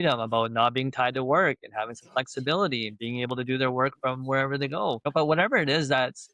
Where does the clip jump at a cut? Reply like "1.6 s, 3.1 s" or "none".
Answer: 5.1 s